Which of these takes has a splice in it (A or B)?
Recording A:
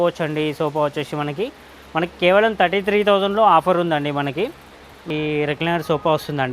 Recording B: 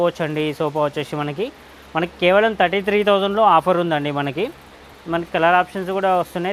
A